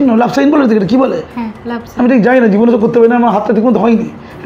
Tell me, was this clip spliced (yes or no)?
no